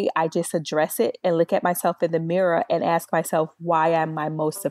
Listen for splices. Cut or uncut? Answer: uncut